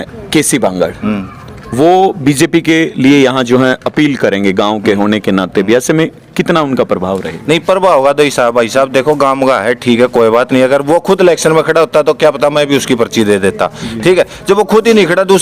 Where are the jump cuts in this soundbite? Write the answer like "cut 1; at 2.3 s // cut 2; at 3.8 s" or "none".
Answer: none